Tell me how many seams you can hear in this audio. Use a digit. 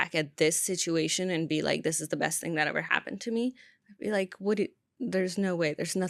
0